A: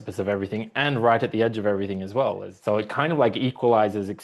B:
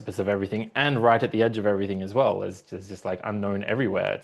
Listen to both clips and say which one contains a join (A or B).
A